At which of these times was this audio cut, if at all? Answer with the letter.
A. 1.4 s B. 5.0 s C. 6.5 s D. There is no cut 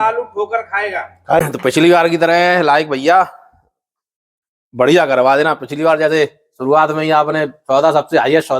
A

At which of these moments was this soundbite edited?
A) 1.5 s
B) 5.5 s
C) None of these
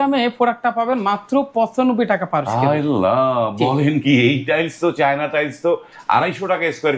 C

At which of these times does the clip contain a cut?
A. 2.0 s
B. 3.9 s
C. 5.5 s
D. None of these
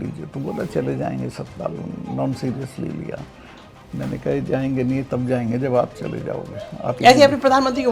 D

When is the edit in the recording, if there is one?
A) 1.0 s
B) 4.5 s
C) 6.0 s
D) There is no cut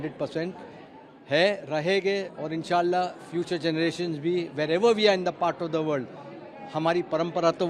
D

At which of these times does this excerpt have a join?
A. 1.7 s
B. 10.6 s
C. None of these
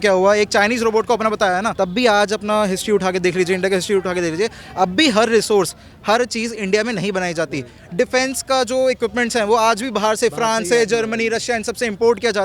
A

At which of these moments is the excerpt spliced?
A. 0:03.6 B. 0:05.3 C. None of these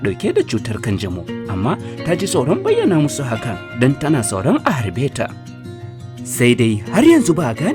C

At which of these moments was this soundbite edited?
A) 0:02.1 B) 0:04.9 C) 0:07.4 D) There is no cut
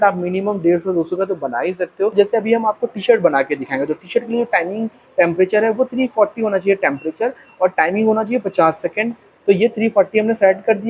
A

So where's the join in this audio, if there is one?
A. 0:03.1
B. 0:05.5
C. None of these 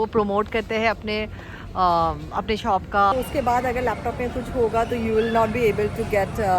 A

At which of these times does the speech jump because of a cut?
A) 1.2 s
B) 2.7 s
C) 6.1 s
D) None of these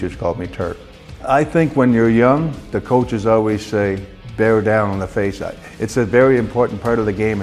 A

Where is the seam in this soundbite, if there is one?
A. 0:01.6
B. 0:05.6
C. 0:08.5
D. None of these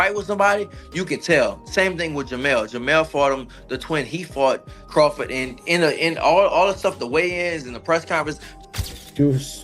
C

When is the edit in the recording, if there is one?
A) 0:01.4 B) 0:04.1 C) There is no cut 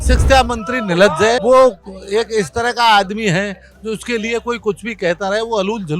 A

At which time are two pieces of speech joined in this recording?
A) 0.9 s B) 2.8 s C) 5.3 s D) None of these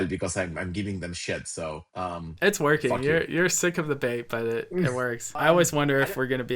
C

